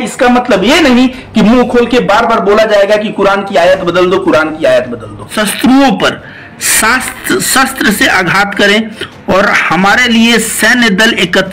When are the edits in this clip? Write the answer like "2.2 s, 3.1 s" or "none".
5.3 s